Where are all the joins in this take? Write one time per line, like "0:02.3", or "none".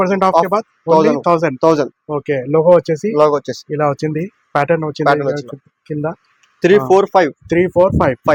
none